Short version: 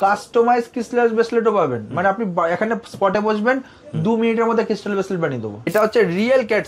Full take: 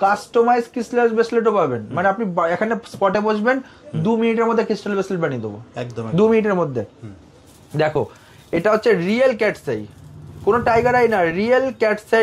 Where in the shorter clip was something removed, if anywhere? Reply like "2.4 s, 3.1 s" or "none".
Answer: 5.7 s